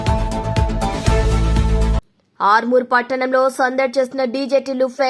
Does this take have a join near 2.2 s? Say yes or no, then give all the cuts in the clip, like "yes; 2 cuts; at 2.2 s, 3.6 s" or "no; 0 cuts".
yes; 1 cut; at 2.2 s